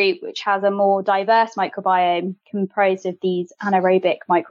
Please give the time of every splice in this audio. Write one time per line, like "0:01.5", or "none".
none